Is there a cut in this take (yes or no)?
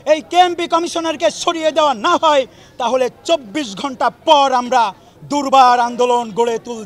no